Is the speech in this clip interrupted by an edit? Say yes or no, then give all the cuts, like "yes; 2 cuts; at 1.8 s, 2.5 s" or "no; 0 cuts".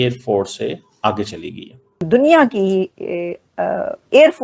yes; 1 cut; at 2.1 s